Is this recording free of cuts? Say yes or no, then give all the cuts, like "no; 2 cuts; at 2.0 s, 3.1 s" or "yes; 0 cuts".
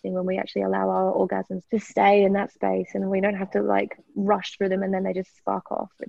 no; 1 cut; at 1.6 s